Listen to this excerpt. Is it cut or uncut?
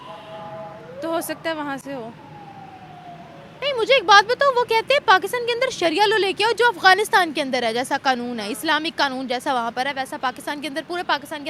uncut